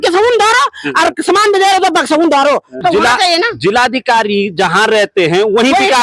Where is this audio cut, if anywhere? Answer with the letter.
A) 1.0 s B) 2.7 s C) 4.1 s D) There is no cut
B